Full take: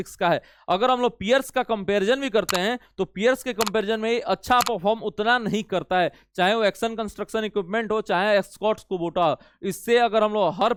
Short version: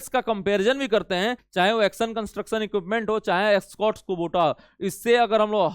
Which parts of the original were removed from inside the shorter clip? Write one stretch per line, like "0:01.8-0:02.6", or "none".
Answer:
0:02.8-0:06.2